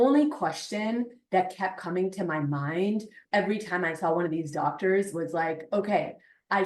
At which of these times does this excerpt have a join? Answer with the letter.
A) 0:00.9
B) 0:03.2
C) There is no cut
B